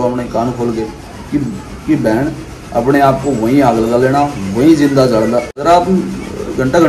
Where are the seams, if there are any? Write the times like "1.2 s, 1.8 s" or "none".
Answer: 5.5 s